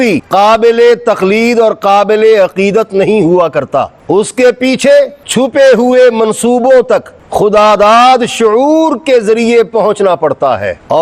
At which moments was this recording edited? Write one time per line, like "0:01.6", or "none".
none